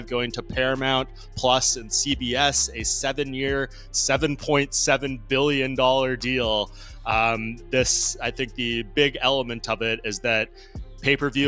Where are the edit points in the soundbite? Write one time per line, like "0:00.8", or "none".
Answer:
none